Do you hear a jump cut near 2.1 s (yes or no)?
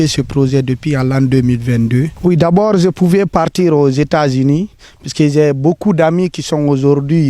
yes